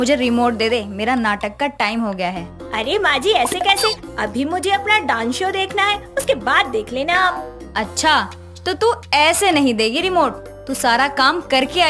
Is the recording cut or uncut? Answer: uncut